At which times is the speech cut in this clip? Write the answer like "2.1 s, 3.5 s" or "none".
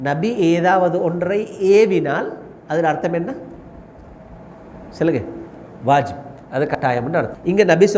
6.8 s